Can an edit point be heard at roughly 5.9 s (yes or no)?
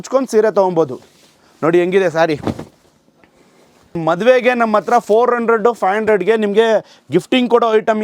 no